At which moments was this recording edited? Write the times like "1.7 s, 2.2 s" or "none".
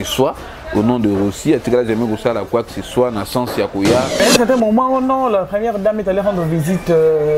4.1 s